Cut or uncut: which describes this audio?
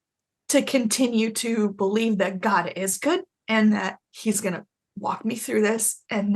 cut